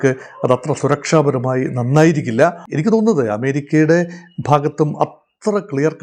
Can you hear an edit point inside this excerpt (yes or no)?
yes